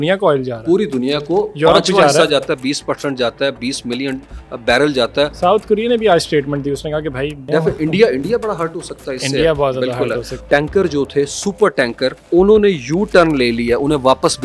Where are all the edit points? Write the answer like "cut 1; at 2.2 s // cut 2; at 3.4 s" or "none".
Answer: cut 1; at 7.5 s // cut 2; at 10.3 s // cut 3; at 12.2 s